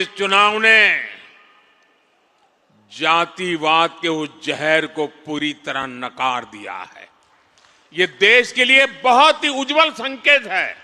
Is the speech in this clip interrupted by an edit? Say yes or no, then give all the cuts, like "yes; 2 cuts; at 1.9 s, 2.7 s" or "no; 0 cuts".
no; 0 cuts